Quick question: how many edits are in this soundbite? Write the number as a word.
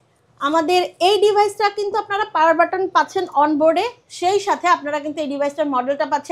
zero